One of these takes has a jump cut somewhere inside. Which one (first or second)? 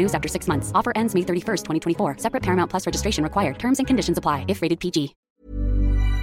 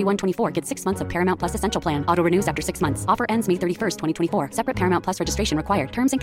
first